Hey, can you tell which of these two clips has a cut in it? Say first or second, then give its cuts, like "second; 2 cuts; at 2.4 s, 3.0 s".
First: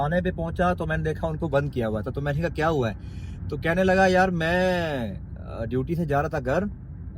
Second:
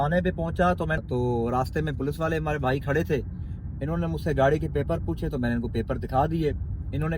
second; 1 cut; at 1.0 s